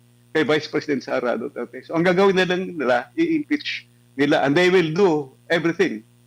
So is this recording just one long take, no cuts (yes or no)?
yes